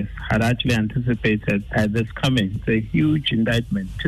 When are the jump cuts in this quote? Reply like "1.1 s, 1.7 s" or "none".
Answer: 1.7 s